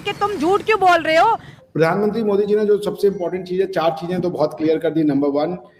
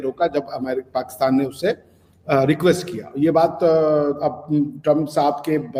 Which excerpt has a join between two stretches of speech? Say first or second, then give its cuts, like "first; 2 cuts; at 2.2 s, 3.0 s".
first; 1 cut; at 1.5 s